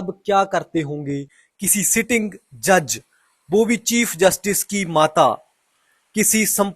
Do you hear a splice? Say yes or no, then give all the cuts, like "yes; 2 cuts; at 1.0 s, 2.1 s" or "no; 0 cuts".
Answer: yes; 1 cut; at 1.4 s